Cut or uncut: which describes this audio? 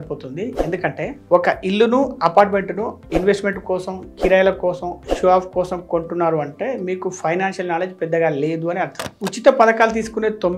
cut